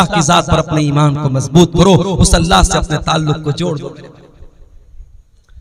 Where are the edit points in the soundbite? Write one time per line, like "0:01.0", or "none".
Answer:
none